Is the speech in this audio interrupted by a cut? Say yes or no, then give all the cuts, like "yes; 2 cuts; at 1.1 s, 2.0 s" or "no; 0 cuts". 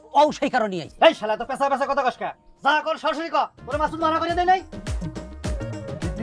yes; 1 cut; at 3.6 s